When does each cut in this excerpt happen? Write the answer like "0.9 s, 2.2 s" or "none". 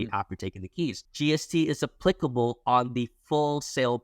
1.0 s